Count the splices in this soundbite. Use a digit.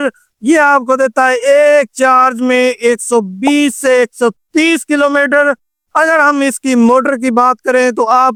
0